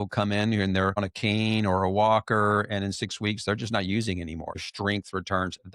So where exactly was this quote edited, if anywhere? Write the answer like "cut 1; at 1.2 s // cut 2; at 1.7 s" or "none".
cut 1; at 1.0 s // cut 2; at 4.6 s